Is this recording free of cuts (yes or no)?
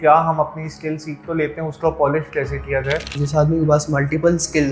no